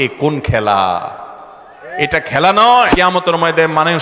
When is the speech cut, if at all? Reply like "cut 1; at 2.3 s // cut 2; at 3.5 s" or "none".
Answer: cut 1; at 2.9 s